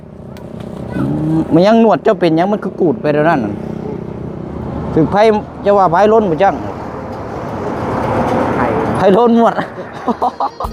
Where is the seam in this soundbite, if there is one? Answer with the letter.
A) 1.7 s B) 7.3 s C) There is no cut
C